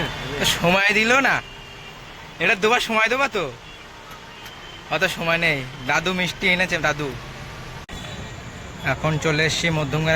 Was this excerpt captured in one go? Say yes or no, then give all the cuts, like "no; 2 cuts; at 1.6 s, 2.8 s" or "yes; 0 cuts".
no; 1 cut; at 8.0 s